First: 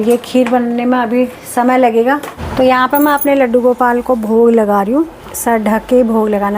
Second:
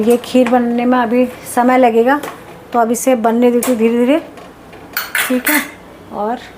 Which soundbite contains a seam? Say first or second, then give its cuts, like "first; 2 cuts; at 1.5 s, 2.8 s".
first; 2 cuts; at 2.4 s, 5.3 s